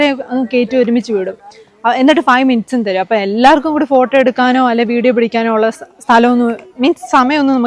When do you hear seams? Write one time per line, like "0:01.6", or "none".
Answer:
none